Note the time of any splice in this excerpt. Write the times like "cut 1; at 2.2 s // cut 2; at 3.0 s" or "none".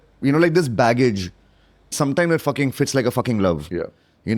cut 1; at 1.9 s